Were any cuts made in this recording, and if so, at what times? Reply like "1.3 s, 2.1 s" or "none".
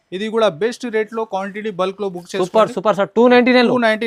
none